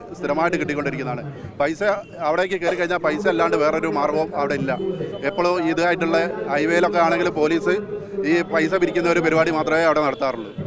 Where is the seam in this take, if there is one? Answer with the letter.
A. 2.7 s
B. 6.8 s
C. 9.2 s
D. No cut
D